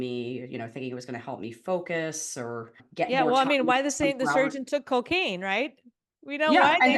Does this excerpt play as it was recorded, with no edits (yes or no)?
no